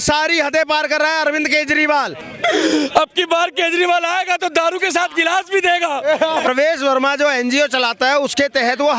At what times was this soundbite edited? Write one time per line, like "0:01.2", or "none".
0:02.2
0:06.5